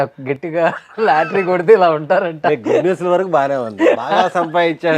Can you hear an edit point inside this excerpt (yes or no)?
no